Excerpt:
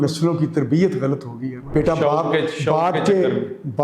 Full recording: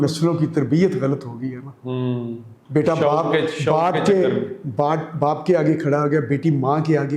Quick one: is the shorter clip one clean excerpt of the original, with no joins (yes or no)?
no